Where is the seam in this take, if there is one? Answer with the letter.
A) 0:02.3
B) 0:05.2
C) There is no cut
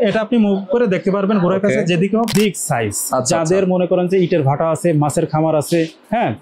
A